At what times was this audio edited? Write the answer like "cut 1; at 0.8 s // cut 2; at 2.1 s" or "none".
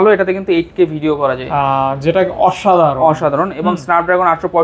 none